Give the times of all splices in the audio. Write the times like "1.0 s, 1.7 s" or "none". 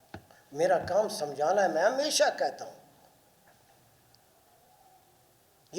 none